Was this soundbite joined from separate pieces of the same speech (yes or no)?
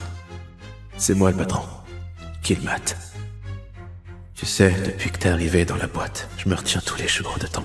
no